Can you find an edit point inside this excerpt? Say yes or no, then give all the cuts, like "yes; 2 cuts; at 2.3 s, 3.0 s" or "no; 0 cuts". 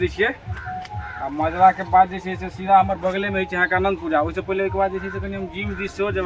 no; 0 cuts